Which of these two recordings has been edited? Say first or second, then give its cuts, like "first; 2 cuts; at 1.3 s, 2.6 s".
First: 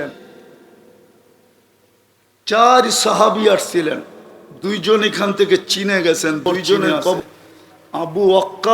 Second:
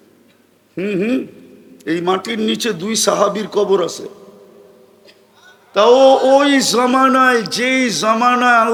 first; 1 cut; at 7.2 s